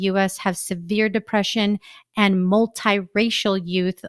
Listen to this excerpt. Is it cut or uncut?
uncut